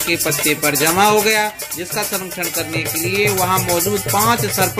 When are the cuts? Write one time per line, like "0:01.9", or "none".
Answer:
none